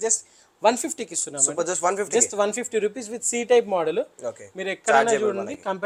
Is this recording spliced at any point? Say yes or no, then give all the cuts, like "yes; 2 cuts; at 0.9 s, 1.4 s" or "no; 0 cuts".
no; 0 cuts